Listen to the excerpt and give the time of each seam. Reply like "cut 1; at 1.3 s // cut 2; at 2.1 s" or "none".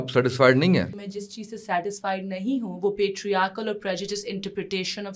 cut 1; at 1.0 s